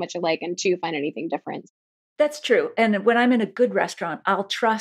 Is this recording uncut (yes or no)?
no